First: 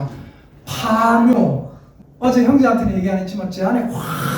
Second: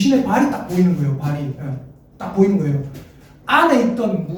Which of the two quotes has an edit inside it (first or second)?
first